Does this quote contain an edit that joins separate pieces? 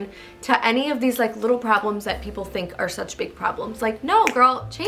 no; 0 cuts

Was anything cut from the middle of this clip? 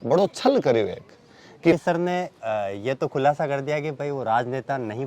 yes; 1 cut; at 1.7 s

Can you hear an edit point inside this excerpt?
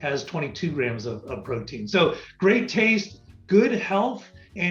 no; 0 cuts

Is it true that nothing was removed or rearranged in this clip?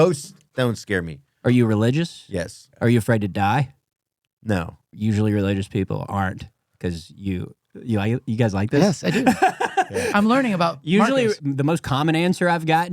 no; 3 cuts; at 2.6 s, 4.8 s, 11.4 s

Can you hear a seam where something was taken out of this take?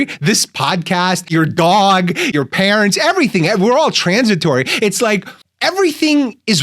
yes; 2 cuts; at 1.3 s, 2.3 s

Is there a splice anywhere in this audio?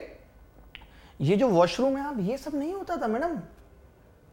no; 0 cuts

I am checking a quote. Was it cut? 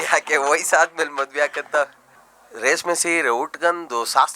no; 0 cuts

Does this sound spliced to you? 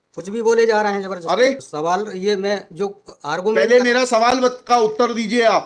yes; 1 cut; at 1.7 s

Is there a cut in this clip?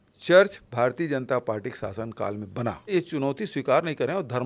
yes; 1 cut; at 2.9 s

